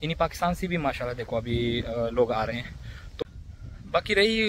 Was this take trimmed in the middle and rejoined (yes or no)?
yes